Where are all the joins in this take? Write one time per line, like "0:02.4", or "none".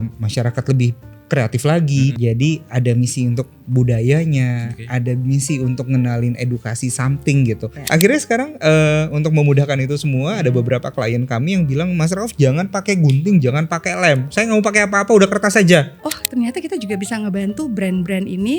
0:02.2
0:07.7
0:16.0